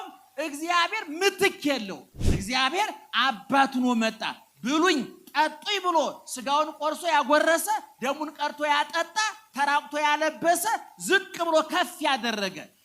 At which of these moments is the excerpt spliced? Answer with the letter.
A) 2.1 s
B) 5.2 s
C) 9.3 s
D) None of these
A